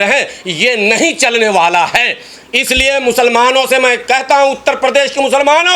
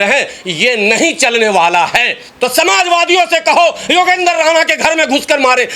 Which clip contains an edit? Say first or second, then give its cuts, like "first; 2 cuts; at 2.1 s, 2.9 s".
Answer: second; 1 cut; at 2.2 s